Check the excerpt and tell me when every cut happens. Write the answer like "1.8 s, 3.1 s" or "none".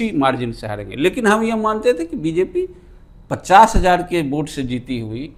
none